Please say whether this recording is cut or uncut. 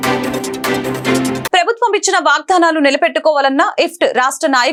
uncut